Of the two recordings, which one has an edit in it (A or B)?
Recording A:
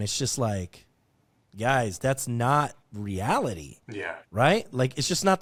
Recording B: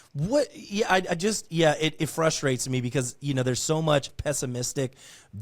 B